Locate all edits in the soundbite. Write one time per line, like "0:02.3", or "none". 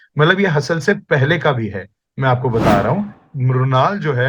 0:03.3